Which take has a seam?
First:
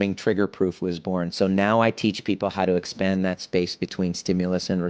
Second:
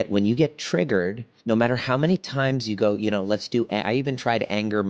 second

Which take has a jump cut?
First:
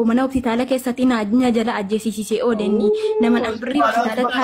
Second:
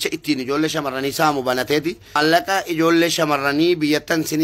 second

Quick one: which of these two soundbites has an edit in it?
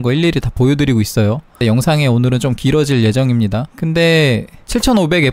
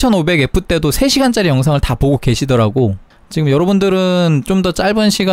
first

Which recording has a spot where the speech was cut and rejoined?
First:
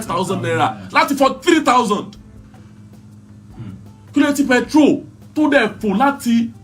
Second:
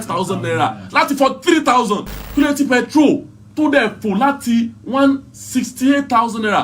second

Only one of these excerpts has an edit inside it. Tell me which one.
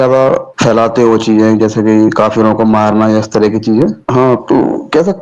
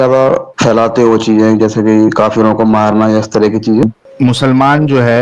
second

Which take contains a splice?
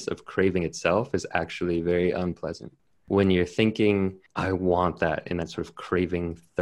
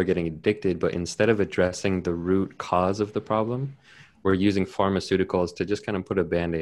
first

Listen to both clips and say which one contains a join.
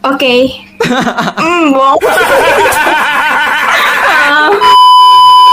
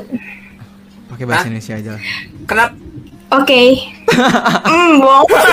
first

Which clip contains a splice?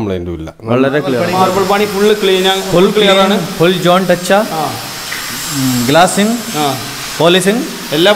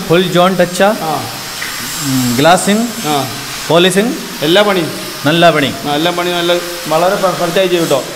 first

